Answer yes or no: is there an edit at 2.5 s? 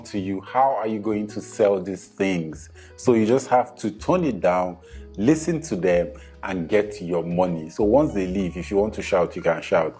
no